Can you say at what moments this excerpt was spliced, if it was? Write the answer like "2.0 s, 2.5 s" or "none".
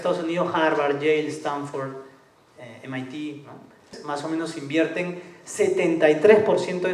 4.0 s

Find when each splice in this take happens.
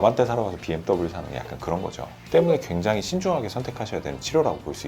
2.1 s

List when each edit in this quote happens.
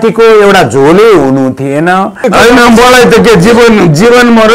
2.2 s

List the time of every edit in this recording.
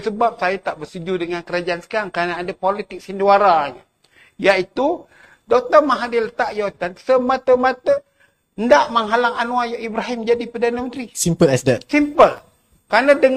11.2 s

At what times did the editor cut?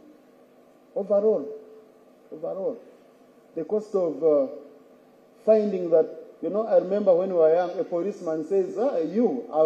none

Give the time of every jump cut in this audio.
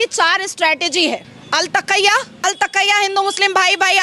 1.3 s, 2.3 s

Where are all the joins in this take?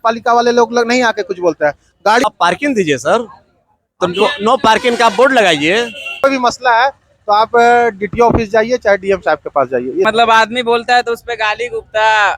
2.2 s, 6.2 s, 10.0 s

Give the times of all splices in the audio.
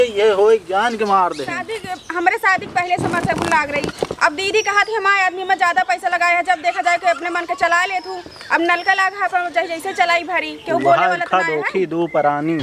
1.5 s

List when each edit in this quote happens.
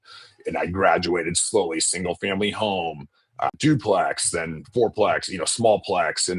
3.5 s

